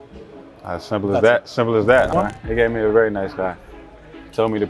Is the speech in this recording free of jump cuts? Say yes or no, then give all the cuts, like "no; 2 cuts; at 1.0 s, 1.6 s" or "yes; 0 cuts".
no; 1 cut; at 2.1 s